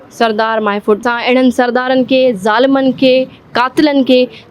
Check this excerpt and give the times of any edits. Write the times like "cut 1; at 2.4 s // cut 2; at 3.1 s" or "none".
cut 1; at 1.0 s